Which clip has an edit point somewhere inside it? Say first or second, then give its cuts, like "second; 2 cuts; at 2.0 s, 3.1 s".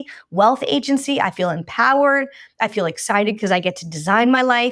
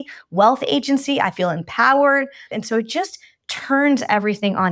second; 1 cut; at 2.5 s